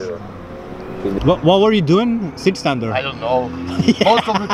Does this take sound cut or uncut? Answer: cut